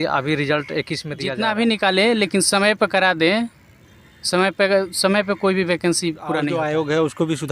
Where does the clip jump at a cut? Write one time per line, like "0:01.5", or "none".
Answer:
0:01.3
0:06.5